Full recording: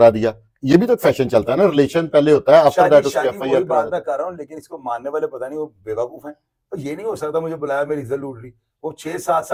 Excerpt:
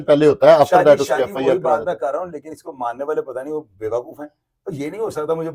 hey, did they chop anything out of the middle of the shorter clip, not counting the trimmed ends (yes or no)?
no